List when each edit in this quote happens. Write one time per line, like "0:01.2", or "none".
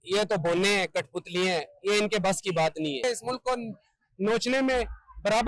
0:03.0